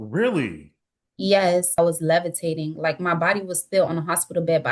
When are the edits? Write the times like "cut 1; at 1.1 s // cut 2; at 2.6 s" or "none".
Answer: cut 1; at 1.8 s

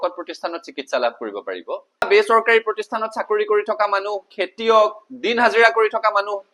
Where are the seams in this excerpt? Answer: cut 1; at 2.1 s

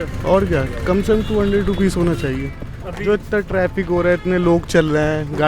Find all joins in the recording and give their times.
cut 1; at 2.5 s

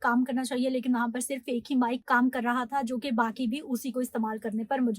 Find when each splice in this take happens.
cut 1; at 2.0 s

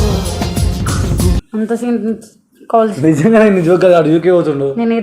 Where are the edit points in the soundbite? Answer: cut 1; at 1.4 s

